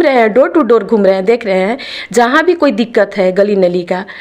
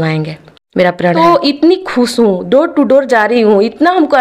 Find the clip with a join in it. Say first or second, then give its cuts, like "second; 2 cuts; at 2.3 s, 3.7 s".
second; 1 cut; at 1.2 s